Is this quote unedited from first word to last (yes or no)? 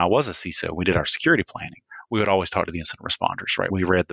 yes